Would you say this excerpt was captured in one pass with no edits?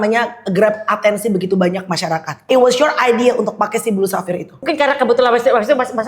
no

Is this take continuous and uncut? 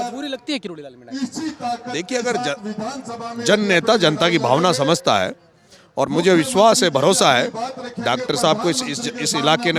yes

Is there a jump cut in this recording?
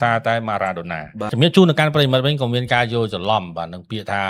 yes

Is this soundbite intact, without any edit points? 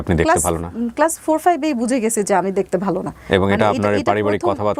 yes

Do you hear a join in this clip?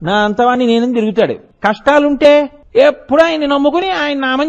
yes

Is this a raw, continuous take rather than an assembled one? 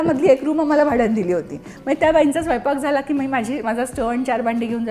yes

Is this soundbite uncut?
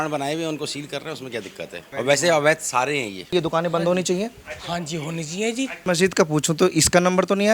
no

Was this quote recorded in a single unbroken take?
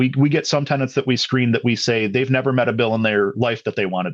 yes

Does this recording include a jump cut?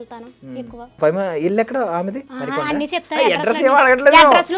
yes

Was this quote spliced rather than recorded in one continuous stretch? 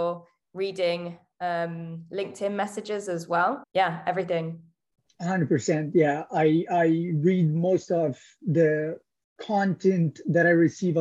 yes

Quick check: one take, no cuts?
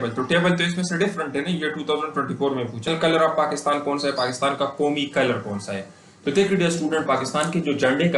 no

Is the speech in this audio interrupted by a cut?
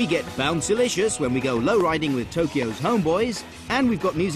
yes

